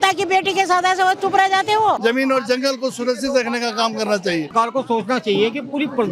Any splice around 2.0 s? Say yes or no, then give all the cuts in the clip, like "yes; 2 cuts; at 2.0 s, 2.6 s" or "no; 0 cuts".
yes; 2 cuts; at 2.0 s, 4.5 s